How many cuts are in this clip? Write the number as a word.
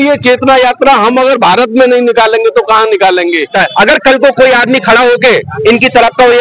one